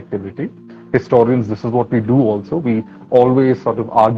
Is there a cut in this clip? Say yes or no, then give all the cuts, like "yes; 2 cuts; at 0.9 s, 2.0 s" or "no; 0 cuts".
no; 0 cuts